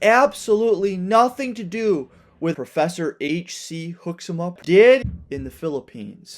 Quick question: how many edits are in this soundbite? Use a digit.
3